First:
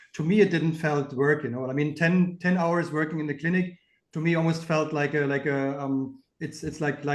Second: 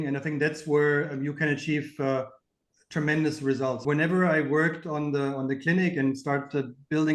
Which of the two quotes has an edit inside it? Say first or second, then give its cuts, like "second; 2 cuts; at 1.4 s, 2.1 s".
second; 1 cut; at 3.8 s